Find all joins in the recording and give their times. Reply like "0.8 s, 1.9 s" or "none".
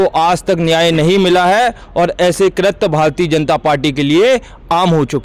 none